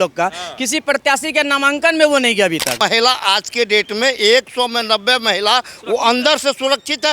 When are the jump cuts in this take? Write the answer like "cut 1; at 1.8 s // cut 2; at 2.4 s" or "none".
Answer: cut 1; at 2.8 s